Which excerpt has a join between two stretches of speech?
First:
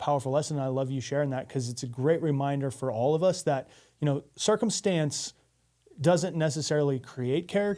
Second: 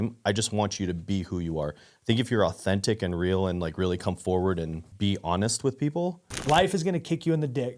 second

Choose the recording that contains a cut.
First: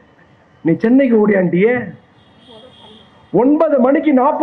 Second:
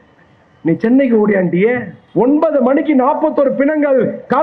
second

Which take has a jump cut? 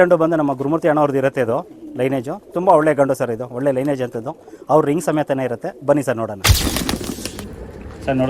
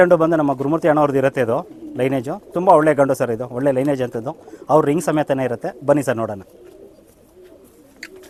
first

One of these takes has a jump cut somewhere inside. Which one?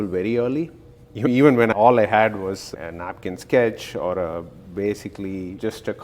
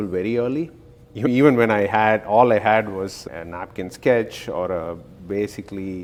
first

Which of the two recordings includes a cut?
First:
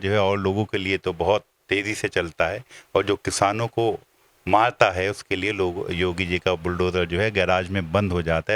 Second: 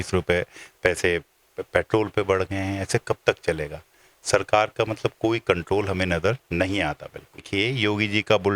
second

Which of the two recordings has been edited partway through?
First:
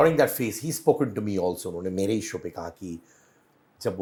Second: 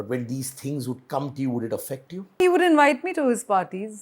second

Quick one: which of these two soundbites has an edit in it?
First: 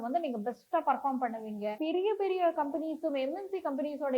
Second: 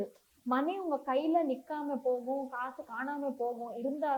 first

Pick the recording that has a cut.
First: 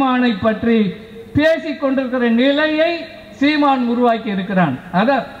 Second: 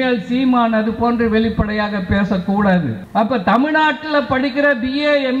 second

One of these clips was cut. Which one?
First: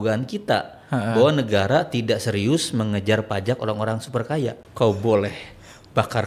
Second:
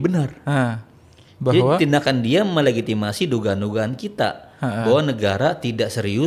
first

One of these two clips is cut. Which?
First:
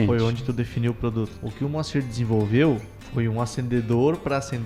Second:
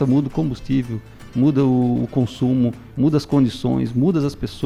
first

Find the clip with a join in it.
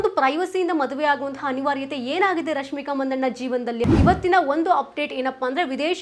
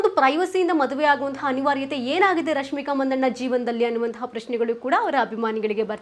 first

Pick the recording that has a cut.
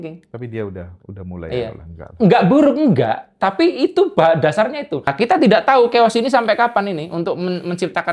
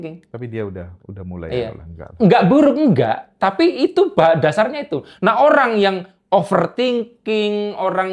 first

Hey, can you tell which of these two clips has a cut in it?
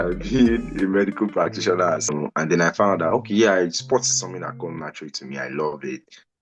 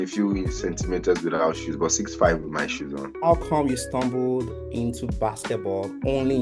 first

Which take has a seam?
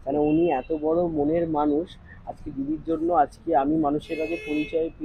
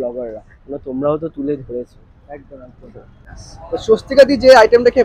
second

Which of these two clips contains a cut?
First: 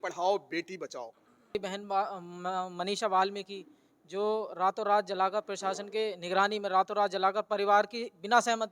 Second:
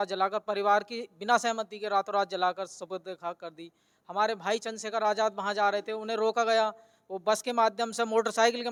first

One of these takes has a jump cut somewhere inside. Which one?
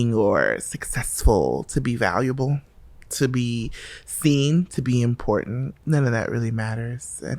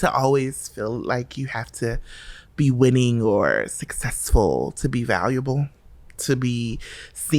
first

